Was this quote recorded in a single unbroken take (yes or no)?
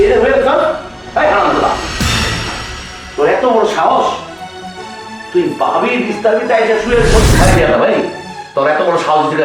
no